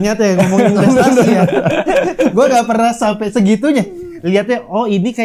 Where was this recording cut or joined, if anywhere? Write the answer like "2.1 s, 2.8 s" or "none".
none